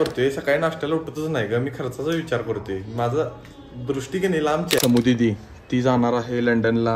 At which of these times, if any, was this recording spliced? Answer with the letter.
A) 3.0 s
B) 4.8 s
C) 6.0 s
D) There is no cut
B